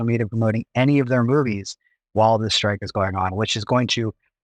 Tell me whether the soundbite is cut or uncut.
uncut